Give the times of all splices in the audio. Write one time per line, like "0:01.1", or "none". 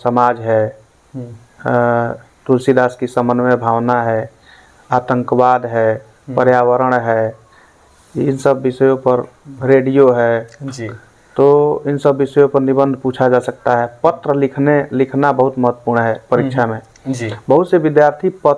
none